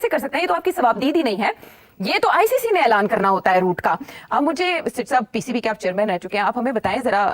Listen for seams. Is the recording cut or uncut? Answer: uncut